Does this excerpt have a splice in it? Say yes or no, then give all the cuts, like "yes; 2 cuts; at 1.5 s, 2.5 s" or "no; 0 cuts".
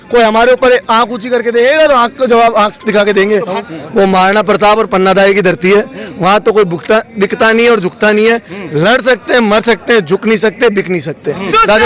yes; 1 cut; at 3.6 s